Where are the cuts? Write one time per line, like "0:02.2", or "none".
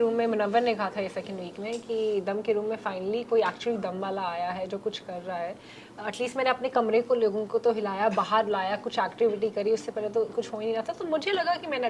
none